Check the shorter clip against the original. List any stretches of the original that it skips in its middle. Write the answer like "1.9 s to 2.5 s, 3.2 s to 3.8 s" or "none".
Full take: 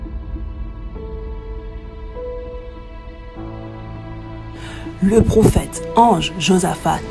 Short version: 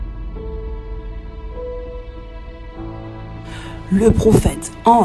4.5 s to 5.0 s